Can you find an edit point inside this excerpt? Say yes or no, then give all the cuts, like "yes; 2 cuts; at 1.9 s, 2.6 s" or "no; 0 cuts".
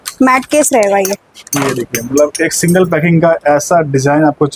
no; 0 cuts